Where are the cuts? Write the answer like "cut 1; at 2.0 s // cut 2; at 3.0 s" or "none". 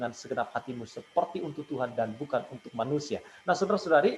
none